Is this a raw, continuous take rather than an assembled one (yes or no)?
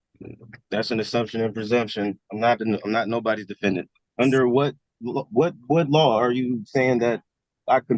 no